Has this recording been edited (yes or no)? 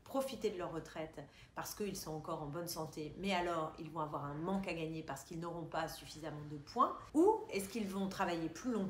yes